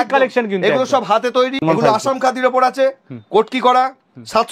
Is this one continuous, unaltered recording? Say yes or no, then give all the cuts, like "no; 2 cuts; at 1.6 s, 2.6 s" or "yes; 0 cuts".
no; 1 cut; at 1.6 s